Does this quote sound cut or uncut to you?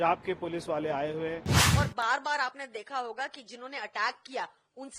cut